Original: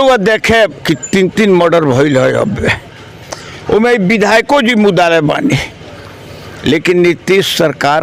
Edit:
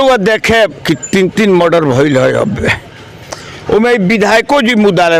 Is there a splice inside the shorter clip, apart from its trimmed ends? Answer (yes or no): no